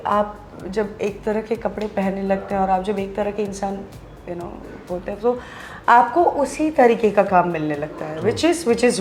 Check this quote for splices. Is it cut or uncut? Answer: uncut